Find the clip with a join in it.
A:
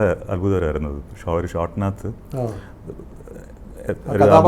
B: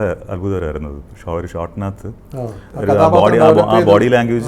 B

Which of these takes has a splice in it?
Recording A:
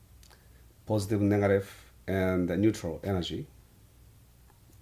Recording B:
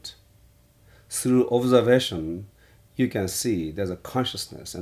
B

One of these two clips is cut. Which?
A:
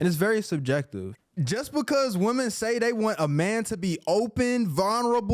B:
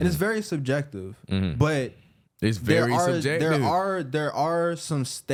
A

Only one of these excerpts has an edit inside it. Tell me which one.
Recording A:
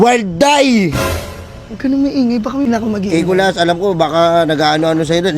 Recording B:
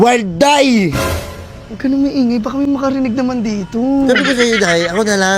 A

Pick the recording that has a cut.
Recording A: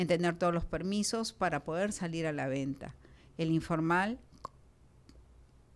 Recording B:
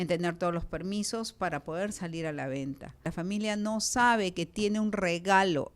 B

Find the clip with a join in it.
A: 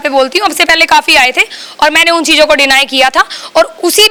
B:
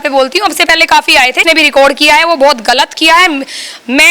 B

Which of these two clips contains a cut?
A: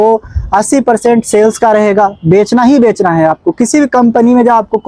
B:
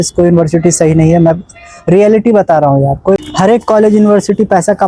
B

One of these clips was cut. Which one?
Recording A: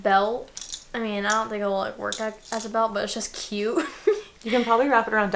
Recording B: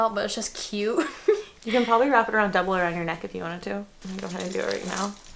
B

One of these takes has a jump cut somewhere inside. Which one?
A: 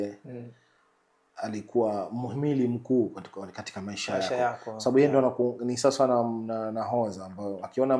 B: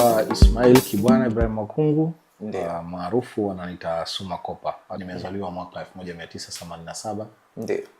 B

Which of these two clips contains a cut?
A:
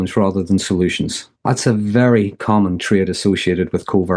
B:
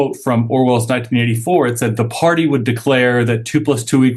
A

